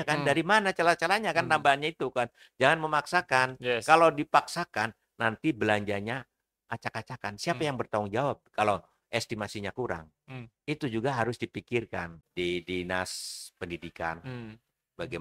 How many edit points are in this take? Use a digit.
1